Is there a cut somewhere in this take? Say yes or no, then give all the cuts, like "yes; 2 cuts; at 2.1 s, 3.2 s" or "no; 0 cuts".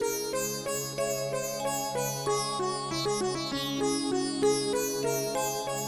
no; 0 cuts